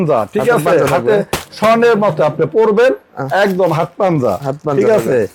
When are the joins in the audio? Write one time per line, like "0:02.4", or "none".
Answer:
none